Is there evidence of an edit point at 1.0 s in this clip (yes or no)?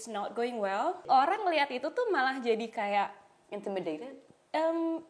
yes